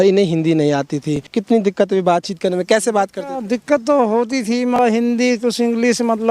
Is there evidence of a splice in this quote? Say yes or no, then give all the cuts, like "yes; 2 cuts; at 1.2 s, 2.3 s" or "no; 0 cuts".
yes; 2 cuts; at 1.3 s, 4.8 s